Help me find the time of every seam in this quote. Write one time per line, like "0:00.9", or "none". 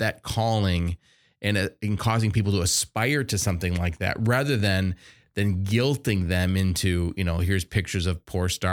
none